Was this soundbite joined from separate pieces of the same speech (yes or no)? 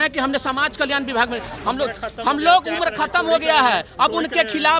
yes